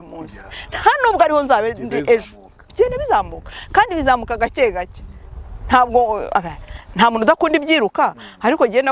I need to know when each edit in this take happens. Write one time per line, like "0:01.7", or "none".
none